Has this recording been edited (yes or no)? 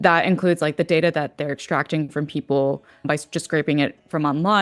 no